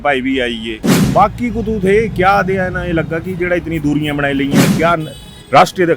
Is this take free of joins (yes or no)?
no